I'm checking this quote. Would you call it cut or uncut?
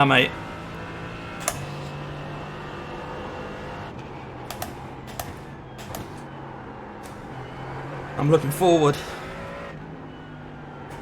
uncut